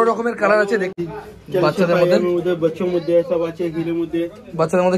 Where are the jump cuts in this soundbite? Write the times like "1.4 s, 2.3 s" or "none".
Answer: 0.9 s